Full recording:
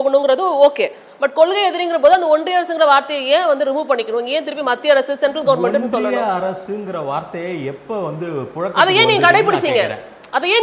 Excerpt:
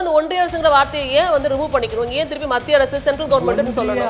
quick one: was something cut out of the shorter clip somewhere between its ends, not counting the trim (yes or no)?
no